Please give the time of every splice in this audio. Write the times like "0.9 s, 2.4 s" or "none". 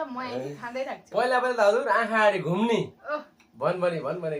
none